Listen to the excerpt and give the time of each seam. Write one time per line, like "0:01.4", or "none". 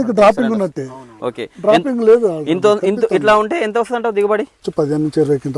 0:04.7